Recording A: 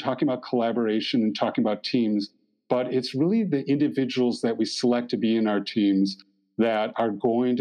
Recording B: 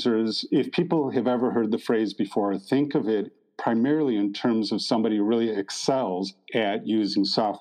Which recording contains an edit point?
B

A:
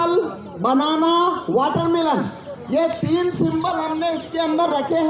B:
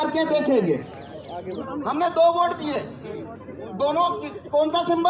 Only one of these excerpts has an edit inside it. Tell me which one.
B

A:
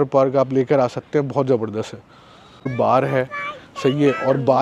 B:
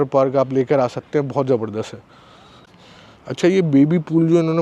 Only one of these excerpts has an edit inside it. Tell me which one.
A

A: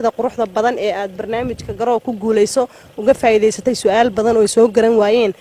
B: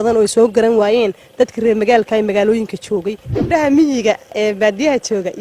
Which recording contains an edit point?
B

